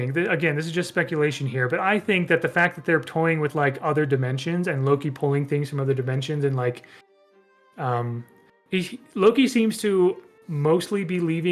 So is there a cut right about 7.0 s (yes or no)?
no